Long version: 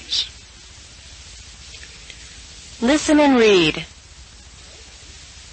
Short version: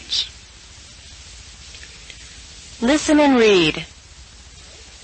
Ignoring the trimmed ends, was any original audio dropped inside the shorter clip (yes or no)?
no